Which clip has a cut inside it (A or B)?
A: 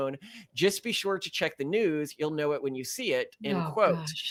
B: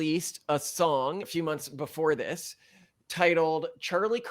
B